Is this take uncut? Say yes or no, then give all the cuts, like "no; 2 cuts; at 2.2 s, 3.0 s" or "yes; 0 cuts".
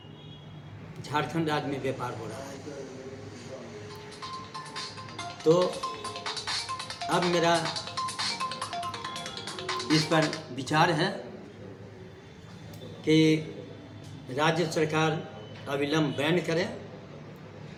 yes; 0 cuts